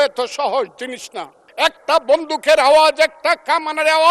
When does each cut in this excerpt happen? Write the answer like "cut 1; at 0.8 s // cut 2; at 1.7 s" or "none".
cut 1; at 1.4 s